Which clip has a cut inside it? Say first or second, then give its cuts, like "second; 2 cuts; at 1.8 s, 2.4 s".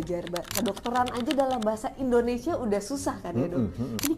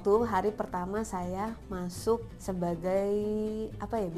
second; 1 cut; at 2.3 s